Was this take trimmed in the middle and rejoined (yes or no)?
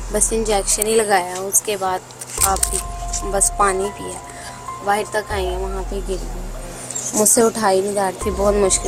no